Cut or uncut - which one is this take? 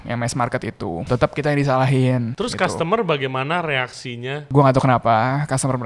cut